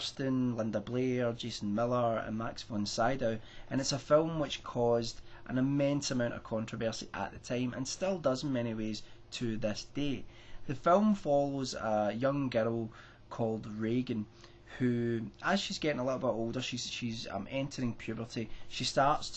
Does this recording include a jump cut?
yes; 1 cut; at 12.1 s

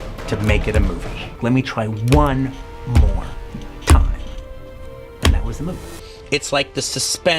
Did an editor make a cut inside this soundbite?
yes; 2 cuts; at 1.2 s, 5.9 s

